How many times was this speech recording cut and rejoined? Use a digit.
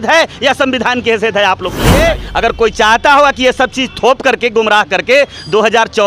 1